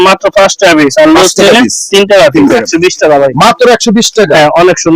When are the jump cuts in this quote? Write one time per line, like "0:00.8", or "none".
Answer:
0:02.7